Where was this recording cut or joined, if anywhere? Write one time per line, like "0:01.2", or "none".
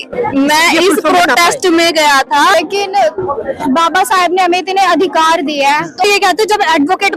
0:02.5
0:06.0